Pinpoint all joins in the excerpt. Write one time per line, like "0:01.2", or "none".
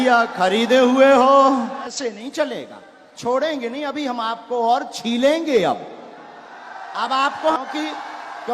0:01.9
0:07.6